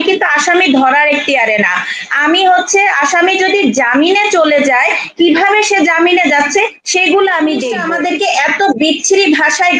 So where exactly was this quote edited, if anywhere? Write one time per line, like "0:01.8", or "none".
0:07.8